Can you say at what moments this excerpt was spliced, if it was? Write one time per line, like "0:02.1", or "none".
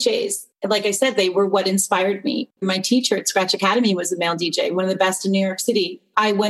0:02.6